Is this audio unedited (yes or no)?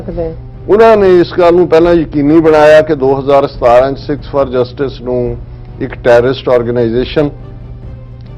yes